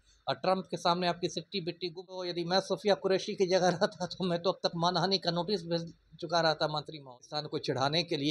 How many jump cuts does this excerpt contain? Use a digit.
2